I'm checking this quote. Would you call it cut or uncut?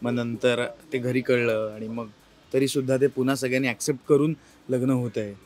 uncut